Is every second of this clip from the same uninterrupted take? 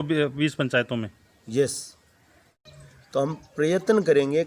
no; 1 cut; at 2.5 s

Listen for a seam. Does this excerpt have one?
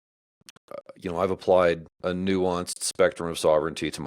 yes; 1 cut; at 1.9 s

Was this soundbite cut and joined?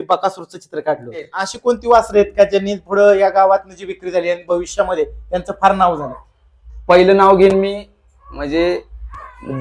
yes; 1 cut; at 1.4 s

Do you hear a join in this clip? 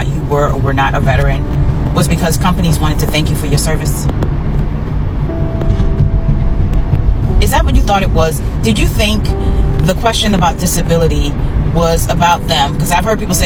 no; 0 cuts

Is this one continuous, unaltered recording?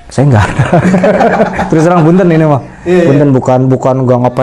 yes; 0 cuts

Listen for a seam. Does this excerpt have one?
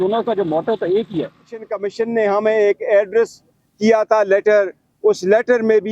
yes; 1 cut; at 1.8 s

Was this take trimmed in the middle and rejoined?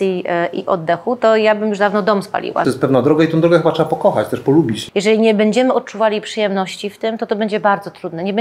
yes; 2 cuts; at 2.6 s, 4.8 s

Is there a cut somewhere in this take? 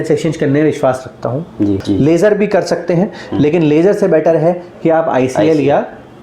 yes; 1 cut; at 1.8 s

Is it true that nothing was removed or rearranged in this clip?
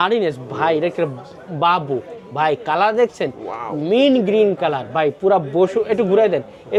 yes; 0 cuts

